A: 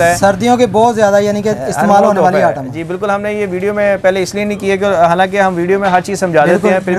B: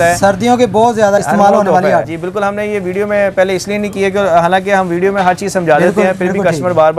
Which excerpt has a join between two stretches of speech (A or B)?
B